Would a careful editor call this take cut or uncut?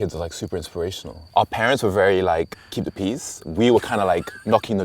cut